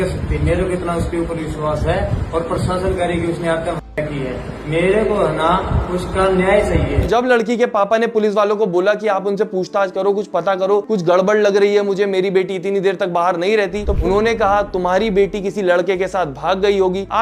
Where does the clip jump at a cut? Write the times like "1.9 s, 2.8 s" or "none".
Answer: 7.0 s, 14.0 s

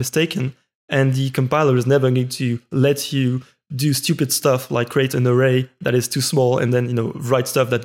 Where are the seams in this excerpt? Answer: none

